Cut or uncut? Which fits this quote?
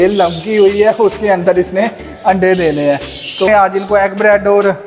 cut